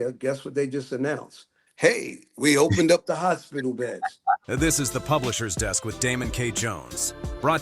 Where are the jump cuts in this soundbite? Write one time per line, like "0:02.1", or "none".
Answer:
0:04.4